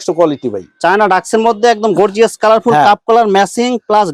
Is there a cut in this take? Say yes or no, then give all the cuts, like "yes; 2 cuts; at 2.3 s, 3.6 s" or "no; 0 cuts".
no; 0 cuts